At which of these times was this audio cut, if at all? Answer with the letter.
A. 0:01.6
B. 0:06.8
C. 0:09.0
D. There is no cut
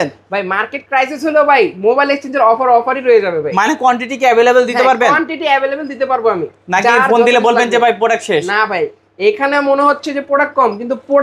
D